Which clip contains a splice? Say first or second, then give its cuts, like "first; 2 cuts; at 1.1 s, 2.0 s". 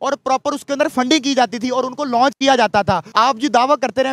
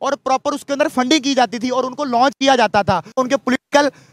first; 1 cut; at 3.0 s